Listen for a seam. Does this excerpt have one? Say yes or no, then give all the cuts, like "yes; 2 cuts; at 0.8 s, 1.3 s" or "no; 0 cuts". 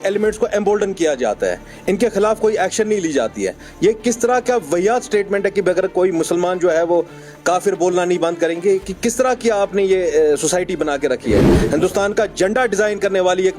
yes; 1 cut; at 11.5 s